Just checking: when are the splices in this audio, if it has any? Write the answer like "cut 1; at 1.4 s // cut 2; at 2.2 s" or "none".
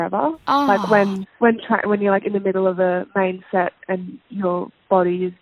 cut 1; at 4.2 s